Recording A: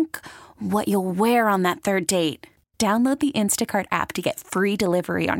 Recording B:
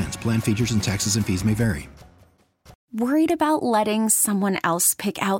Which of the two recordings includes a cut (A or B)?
B